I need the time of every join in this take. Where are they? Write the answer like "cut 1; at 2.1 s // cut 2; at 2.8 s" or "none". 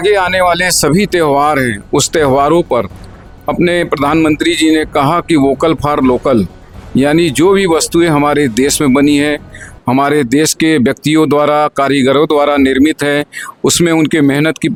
none